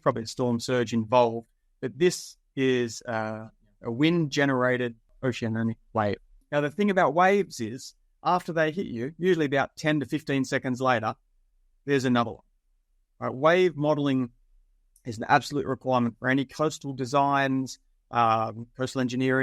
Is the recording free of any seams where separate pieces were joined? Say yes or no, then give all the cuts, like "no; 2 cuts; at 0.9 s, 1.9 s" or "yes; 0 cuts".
no; 2 cuts; at 5.0 s, 6.4 s